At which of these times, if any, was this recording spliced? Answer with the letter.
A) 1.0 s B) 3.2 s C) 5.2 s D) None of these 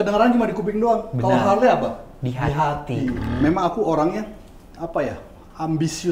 B